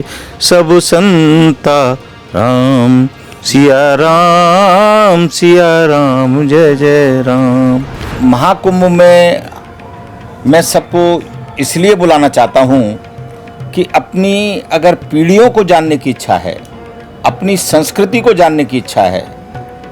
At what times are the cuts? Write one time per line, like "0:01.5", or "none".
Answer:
0:08.1